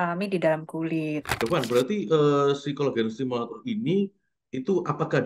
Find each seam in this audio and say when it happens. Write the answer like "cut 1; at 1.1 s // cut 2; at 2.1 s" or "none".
cut 1; at 1.3 s